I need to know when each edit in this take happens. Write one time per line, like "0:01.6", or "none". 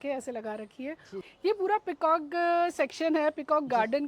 0:01.3